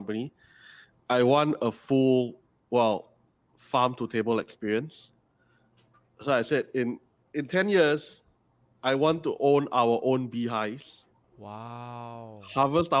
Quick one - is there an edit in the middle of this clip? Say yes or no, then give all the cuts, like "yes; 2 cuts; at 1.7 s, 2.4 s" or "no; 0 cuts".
no; 0 cuts